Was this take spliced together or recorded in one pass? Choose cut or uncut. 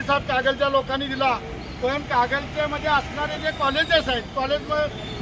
uncut